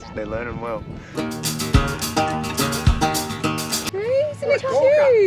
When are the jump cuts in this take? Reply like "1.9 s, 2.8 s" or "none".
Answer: 1.1 s, 3.8 s